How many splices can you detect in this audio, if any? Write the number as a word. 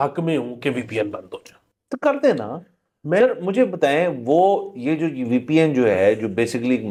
zero